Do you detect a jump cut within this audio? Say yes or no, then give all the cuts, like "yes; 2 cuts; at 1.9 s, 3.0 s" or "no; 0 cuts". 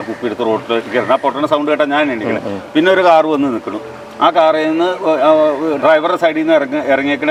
no; 0 cuts